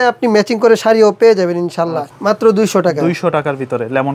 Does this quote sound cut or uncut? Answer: cut